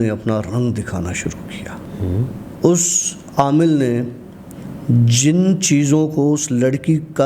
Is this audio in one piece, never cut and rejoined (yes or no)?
no